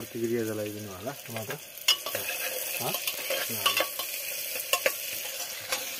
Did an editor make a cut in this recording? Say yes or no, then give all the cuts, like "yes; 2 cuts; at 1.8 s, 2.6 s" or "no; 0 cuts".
no; 0 cuts